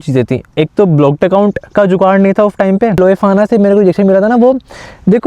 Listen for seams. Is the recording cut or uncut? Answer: cut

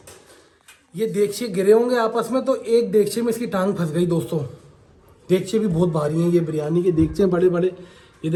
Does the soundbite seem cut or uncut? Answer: uncut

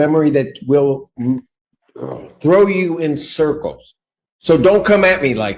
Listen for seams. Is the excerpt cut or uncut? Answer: uncut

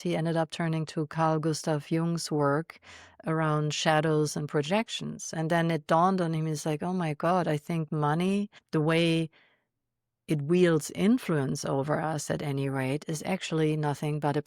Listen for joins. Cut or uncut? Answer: cut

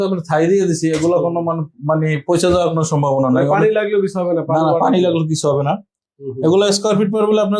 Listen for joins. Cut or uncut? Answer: uncut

